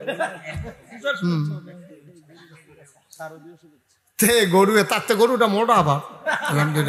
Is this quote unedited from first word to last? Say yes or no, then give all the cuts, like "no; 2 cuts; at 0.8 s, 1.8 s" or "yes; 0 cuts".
yes; 0 cuts